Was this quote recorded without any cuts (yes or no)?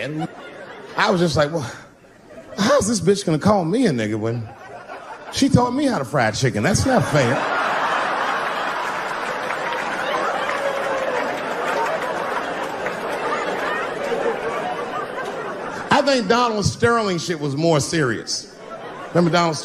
yes